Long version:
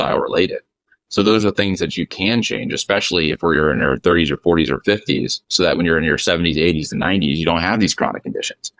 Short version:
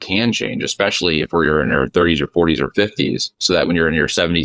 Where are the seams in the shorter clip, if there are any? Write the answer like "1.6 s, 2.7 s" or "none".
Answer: none